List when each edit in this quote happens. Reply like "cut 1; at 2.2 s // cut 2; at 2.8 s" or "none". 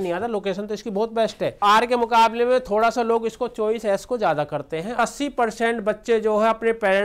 cut 1; at 1.6 s // cut 2; at 5.0 s